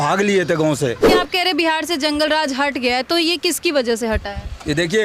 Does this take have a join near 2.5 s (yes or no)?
no